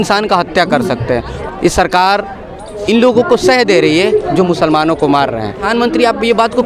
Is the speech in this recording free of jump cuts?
no; 2 cuts; at 1.3 s, 5.6 s

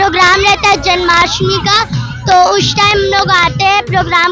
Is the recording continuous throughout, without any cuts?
yes; 0 cuts

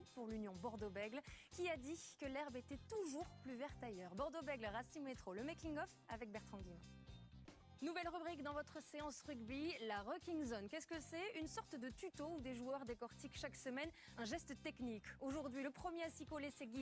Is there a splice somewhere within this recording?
no; 0 cuts

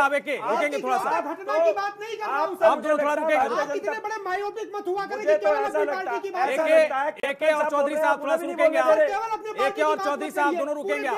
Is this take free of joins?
yes; 0 cuts

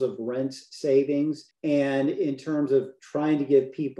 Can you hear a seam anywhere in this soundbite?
yes; 1 cut; at 1.5 s

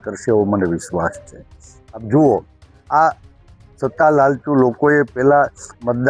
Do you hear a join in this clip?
no; 0 cuts

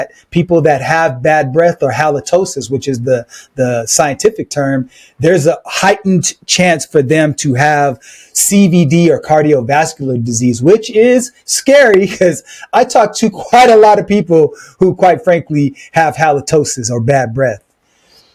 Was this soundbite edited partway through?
no; 0 cuts

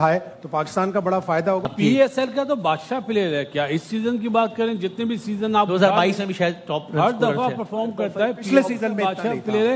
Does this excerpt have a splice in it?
yes; 1 cut; at 1.7 s

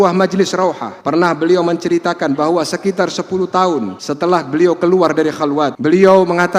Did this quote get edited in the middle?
yes; 3 cuts; at 0.9 s, 4.0 s, 5.8 s

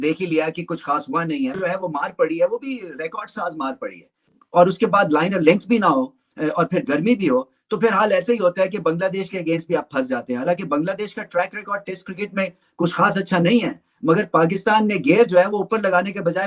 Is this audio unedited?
no; 1 cut; at 4.3 s

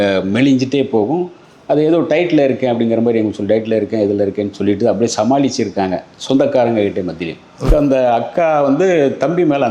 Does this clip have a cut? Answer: yes; 1 cut; at 7.7 s

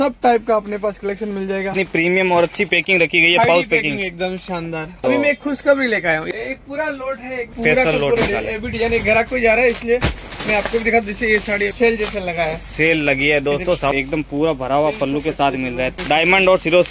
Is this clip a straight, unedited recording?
no; 7 cuts; at 1.7 s, 4.9 s, 6.2 s, 7.5 s, 11.7 s, 13.9 s, 15.9 s

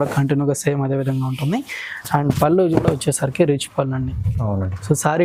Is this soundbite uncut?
yes; 0 cuts

